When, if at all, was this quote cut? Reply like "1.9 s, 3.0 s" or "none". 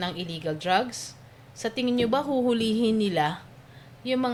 none